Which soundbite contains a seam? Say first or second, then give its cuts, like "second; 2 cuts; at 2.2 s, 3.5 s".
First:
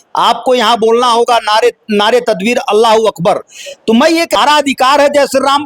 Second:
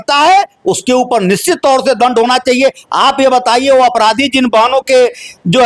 first; 1 cut; at 4.4 s